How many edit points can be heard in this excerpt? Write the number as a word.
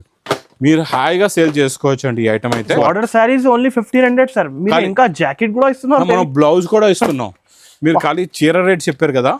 one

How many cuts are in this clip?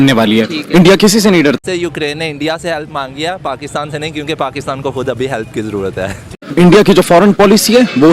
two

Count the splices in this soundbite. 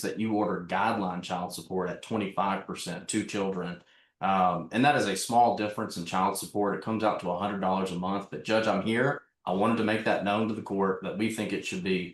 zero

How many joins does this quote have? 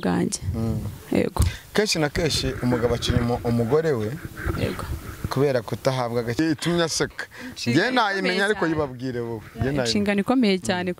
one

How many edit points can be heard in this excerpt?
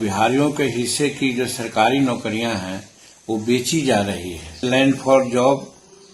one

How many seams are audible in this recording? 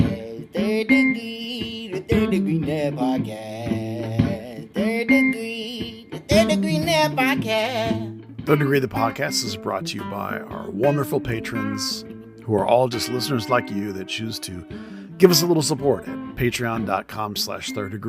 one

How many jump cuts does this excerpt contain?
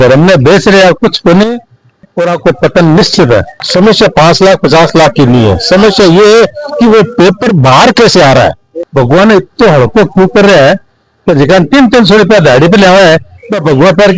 two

